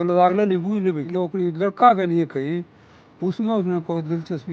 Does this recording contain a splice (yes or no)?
yes